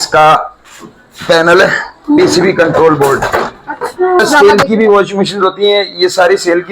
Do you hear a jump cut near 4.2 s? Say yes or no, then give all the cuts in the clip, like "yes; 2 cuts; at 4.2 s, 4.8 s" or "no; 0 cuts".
yes; 1 cut; at 4.2 s